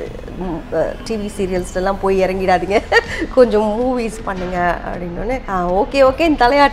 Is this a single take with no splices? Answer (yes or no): no